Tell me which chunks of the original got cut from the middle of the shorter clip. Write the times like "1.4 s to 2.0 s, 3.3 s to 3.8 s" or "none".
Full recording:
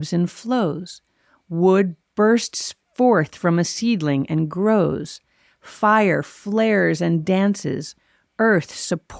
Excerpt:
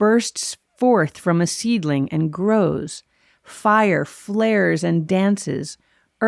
none

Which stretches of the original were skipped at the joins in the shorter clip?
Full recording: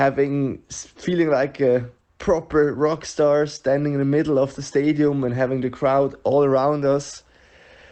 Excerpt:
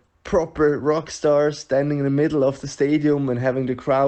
none

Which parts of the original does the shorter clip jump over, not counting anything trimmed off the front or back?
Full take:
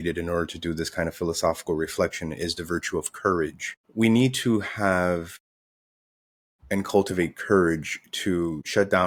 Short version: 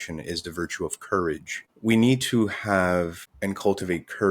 5.4 s to 6.5 s

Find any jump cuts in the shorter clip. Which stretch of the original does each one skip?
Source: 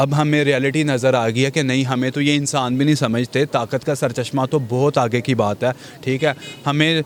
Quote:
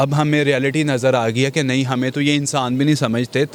none

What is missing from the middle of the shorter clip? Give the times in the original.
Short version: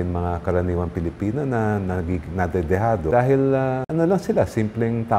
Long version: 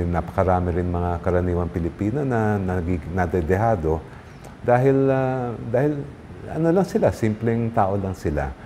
3.9 s to 4.6 s, 5.4 s to 6.5 s

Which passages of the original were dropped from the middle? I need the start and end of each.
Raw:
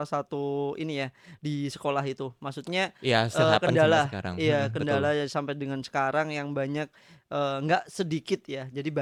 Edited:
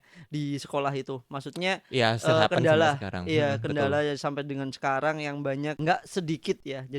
6.9 s to 7.6 s

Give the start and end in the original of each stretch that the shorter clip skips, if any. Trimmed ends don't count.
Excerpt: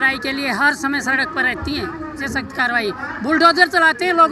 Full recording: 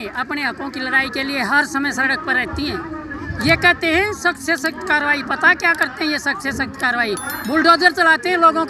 3.1 s to 6.4 s

